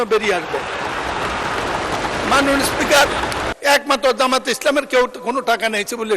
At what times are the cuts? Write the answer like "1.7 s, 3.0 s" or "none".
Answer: 3.5 s